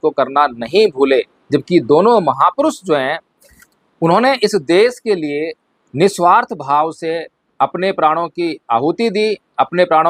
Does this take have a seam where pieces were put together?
no; 0 cuts

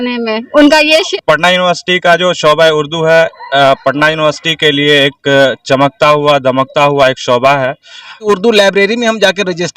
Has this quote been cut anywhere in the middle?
yes; 2 cuts; at 1.1 s, 8.2 s

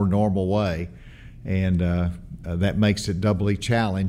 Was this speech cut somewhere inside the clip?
no; 0 cuts

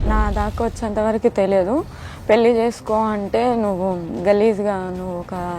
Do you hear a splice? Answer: no; 0 cuts

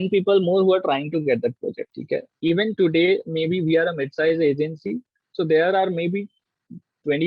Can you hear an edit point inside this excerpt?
yes; 1 cut; at 1.9 s

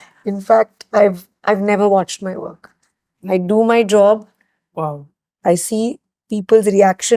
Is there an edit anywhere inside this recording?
no; 0 cuts

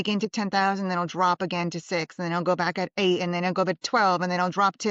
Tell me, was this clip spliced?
no; 0 cuts

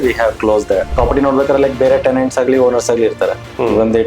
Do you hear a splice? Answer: yes; 1 cut; at 0.9 s

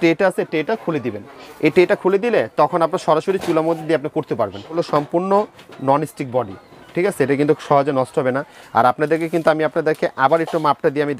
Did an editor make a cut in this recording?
yes; 1 cut; at 4.8 s

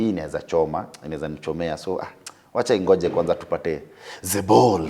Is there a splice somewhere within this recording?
no; 0 cuts

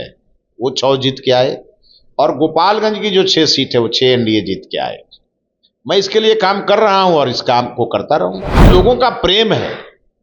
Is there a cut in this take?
yes; 1 cut; at 8.7 s

